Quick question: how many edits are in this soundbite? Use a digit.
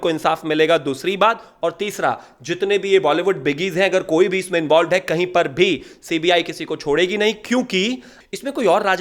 1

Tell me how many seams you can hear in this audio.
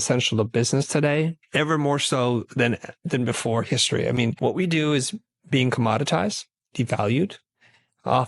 2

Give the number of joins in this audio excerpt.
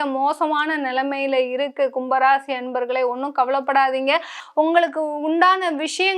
1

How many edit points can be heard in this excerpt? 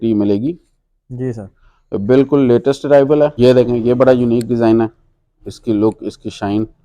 1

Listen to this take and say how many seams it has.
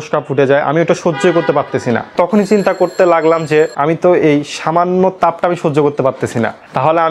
0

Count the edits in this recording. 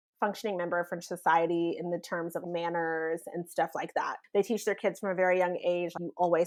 0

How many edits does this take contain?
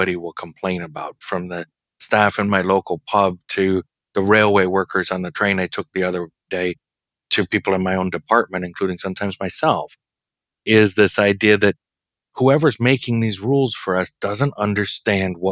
0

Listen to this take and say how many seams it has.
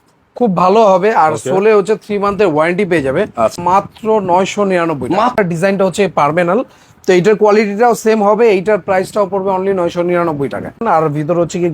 3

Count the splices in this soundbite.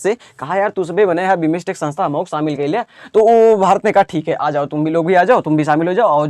0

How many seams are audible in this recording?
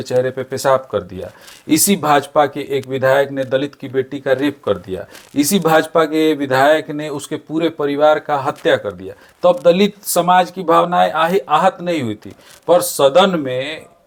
0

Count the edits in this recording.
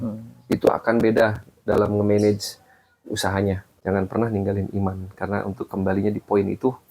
1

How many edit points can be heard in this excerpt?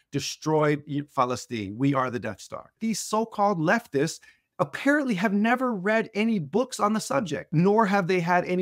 2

